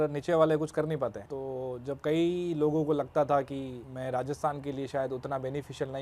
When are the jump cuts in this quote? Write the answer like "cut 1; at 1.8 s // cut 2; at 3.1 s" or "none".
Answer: cut 1; at 1.3 s // cut 2; at 3.8 s

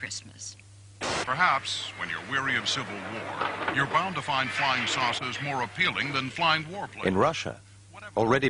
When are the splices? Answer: cut 1; at 3.2 s

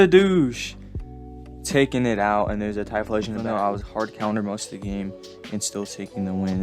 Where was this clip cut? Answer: cut 1; at 3.4 s

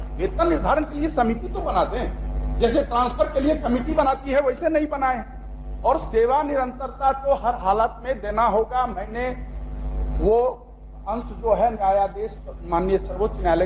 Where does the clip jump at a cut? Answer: none

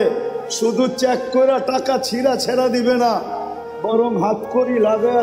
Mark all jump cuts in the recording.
none

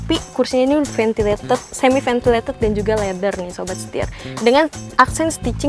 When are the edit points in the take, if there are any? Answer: none

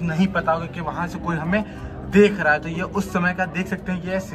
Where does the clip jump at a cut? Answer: none

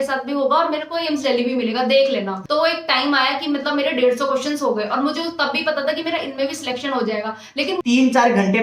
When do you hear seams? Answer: cut 1; at 2.4 s // cut 2; at 7.8 s

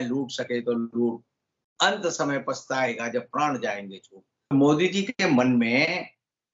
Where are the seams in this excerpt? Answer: cut 1; at 4.5 s

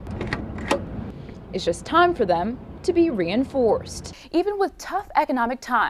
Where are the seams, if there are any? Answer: cut 1; at 4.1 s

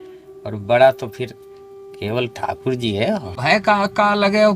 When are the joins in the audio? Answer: cut 1; at 3.3 s

